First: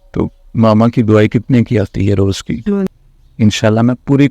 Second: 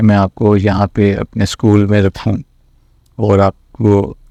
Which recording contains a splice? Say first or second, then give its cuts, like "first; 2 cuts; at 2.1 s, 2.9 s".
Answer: first; 1 cut; at 2.9 s